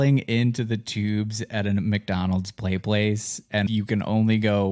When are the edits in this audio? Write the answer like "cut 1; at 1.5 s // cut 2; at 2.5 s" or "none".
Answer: cut 1; at 3.7 s